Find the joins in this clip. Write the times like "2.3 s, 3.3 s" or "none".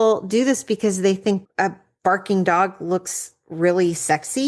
none